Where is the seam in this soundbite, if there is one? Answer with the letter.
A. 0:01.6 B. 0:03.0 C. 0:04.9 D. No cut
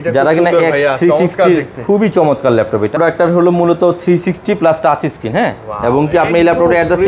B